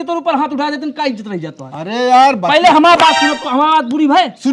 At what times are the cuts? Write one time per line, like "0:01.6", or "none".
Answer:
none